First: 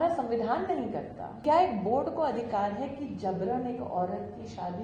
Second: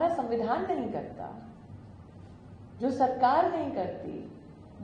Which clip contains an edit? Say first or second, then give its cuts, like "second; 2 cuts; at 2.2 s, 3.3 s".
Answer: first; 1 cut; at 1.4 s